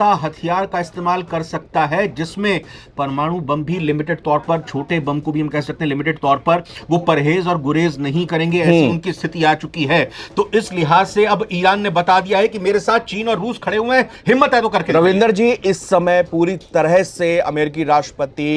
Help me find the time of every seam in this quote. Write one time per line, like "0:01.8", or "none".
none